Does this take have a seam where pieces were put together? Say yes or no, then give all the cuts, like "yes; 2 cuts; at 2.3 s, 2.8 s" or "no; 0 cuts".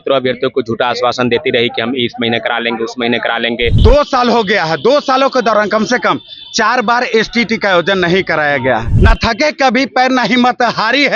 yes; 2 cuts; at 3.8 s, 8.9 s